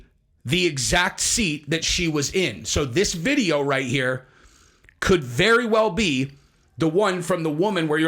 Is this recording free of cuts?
yes; 0 cuts

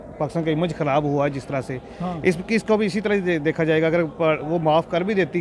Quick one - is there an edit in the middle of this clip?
no; 0 cuts

